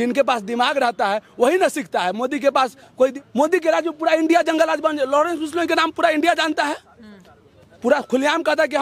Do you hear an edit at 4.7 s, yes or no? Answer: no